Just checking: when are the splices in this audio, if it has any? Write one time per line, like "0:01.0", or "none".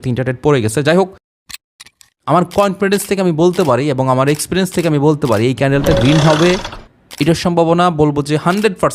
0:01.7